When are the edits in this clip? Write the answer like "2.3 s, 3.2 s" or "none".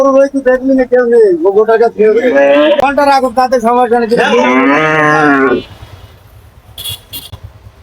2.8 s